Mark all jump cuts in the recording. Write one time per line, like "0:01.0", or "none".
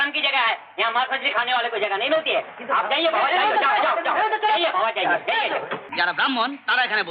0:05.8